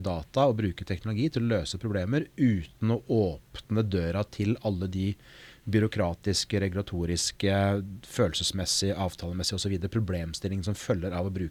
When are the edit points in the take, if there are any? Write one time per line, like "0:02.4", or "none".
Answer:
none